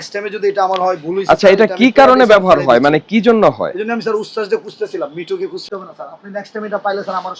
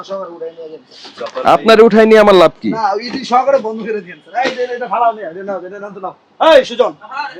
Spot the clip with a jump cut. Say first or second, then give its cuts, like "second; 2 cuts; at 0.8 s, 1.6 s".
first; 1 cut; at 5.7 s